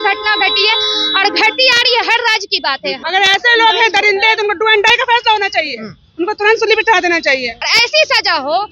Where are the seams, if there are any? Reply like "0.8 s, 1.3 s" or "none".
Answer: 3.0 s, 7.6 s